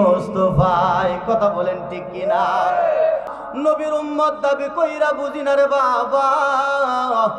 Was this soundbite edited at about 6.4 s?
no; 1 cut; at 3.3 s

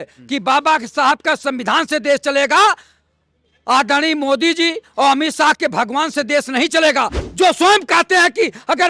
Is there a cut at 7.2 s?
yes; 1 cut; at 7.2 s

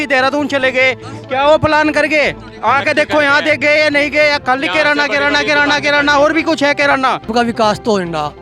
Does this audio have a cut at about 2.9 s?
no; 1 cut; at 7.2 s

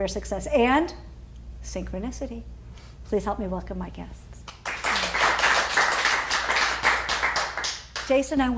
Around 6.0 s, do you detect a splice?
no; 1 cut; at 4.7 s

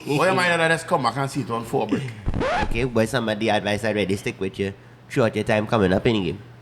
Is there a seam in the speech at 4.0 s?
no; 1 cut; at 2.6 s

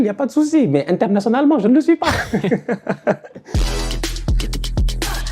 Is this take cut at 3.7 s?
yes; 1 cut; at 3.7 s

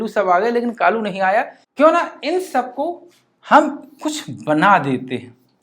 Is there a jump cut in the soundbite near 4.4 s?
no; 1 cut; at 1.6 s

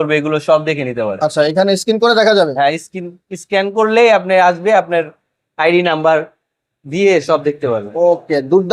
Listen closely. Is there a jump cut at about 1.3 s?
no; 0 cuts

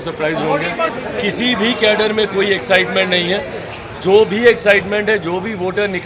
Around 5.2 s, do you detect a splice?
no; 1 cut; at 0.9 s

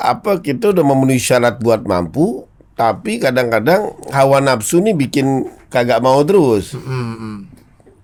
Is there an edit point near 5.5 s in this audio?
no; 0 cuts

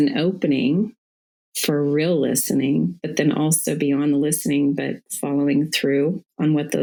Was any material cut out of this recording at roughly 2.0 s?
no; 0 cuts

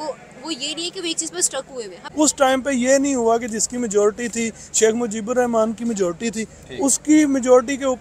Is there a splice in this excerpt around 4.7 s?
no; 1 cut; at 2.0 s

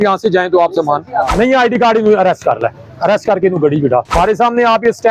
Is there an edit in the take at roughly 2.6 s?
no; 2 cuts; at 1.3 s, 4.1 s

